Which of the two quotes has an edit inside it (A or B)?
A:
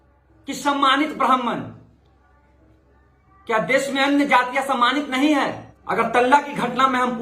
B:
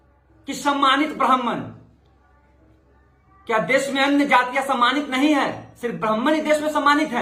A